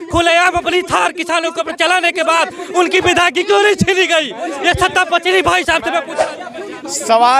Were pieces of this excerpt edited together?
yes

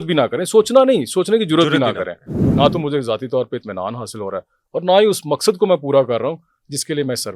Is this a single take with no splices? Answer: no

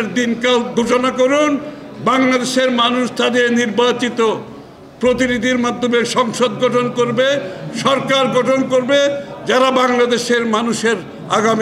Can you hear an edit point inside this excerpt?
no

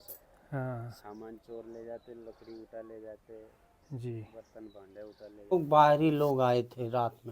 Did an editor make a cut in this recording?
yes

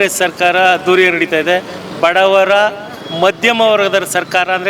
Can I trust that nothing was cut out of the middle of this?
yes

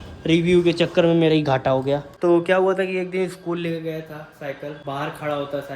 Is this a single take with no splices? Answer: no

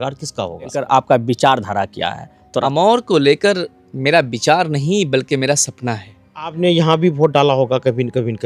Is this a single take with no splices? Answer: no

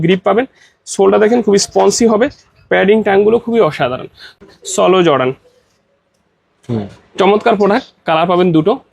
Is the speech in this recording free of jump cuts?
no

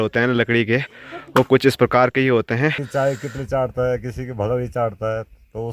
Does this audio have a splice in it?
yes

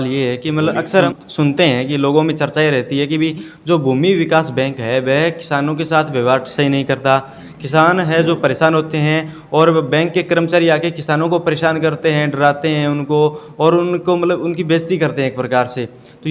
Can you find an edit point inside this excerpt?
no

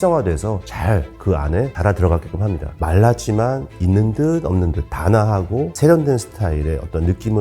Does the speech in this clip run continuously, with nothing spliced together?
no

